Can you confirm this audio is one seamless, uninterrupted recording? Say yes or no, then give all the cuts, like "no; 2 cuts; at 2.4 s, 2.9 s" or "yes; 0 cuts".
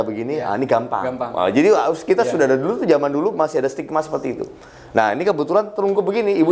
yes; 0 cuts